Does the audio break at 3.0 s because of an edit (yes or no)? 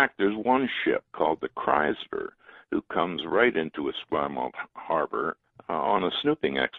no